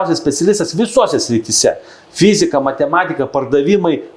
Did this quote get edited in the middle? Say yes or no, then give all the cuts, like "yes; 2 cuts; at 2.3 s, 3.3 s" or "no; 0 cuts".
no; 0 cuts